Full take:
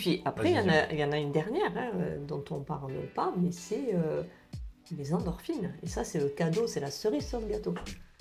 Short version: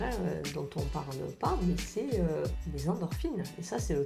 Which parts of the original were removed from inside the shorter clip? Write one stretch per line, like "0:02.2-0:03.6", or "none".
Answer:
0:04.4-0:04.9